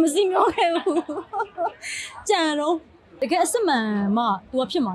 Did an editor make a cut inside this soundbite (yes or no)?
yes